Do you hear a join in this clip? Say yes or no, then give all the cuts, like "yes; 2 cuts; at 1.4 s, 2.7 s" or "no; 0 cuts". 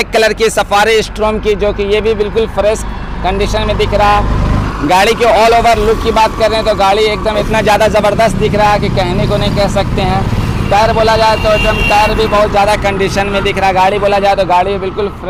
no; 0 cuts